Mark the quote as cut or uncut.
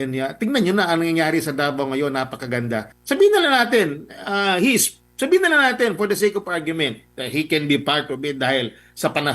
cut